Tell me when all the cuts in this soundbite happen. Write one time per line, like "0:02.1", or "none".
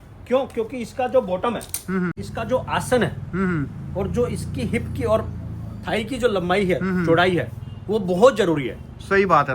0:02.1